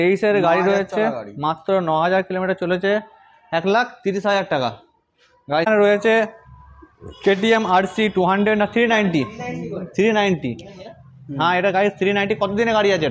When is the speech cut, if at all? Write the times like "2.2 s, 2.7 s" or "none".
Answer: 5.7 s

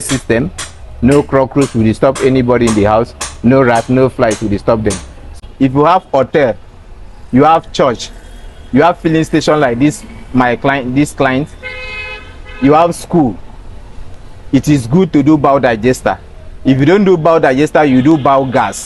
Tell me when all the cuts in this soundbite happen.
5.3 s

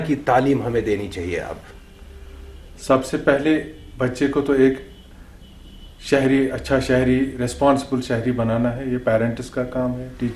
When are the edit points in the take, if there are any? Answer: none

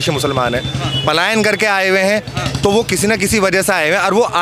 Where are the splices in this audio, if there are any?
none

